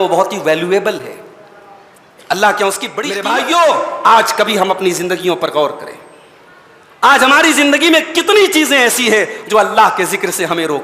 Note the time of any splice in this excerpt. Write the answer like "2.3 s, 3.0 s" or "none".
3.1 s